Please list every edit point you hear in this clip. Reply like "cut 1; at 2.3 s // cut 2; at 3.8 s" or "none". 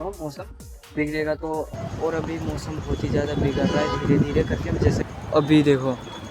cut 1; at 1.7 s // cut 2; at 5.0 s